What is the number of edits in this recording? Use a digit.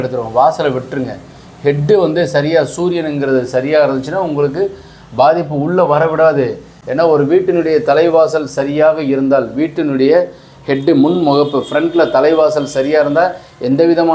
0